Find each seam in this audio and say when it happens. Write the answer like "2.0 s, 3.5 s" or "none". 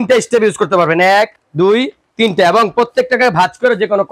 none